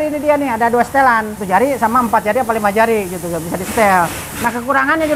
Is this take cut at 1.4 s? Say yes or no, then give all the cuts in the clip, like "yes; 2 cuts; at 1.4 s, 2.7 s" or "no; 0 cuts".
yes; 1 cut; at 1.4 s